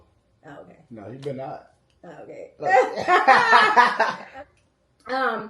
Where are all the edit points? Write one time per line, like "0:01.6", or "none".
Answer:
0:04.2